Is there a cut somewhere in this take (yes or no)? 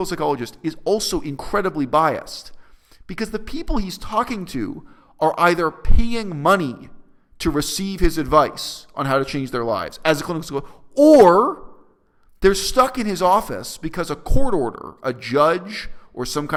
no